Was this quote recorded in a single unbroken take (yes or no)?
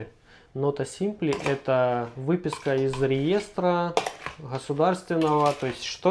yes